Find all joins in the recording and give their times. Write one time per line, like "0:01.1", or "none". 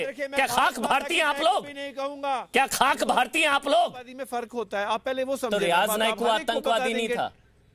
0:04.2